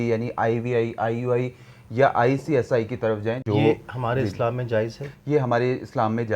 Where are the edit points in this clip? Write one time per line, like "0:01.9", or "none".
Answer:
0:03.4